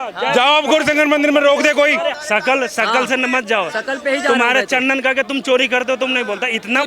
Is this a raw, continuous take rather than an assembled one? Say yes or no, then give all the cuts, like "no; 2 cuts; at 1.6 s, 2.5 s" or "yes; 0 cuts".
no; 1 cut; at 2.2 s